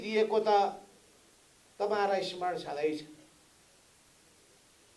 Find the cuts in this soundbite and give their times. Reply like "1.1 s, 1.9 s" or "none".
none